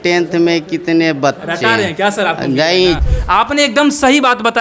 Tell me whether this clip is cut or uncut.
cut